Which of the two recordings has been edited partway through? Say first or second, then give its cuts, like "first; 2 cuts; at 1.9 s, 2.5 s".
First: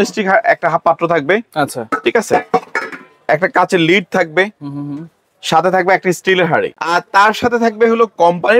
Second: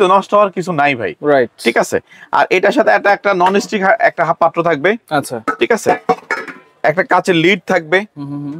first; 1 cut; at 6.8 s